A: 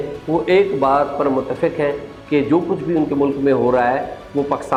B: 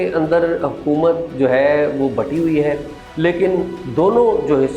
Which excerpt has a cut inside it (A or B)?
B